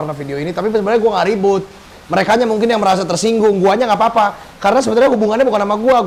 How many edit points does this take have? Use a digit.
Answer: 0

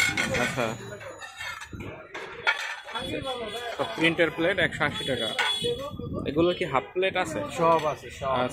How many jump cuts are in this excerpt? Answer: 0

